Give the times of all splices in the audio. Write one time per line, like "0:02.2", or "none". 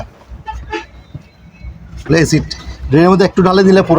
0:01.9